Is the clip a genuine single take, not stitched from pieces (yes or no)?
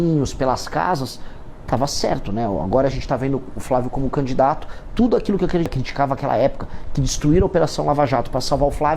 no